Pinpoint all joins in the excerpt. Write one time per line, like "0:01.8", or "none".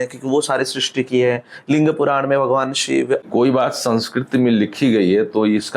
0:03.2

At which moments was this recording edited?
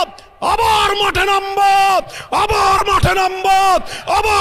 none

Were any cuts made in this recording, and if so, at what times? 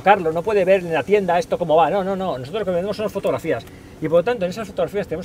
none

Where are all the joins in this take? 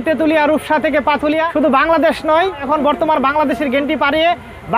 0:01.5
0:02.6

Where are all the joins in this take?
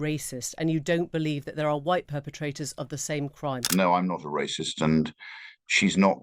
0:03.6

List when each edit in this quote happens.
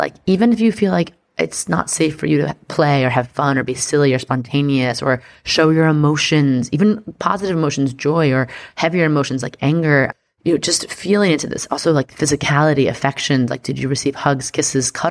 none

